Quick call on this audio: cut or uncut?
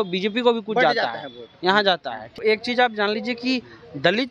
cut